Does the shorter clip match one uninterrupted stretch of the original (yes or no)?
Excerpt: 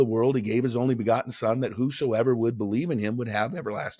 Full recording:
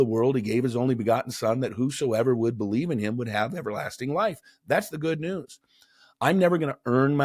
yes